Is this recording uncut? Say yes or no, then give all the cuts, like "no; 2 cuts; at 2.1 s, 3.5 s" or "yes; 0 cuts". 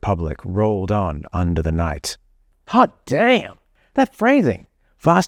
yes; 0 cuts